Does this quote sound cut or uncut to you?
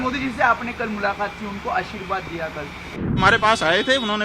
cut